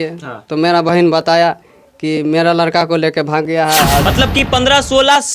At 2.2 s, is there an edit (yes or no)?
no